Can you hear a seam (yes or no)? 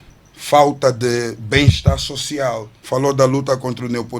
yes